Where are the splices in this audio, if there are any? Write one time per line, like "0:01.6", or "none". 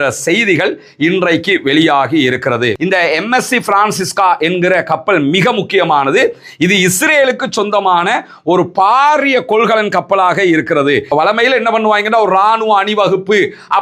0:02.8
0:11.1